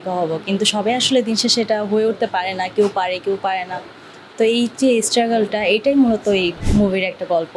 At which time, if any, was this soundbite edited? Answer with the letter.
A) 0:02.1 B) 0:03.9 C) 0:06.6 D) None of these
C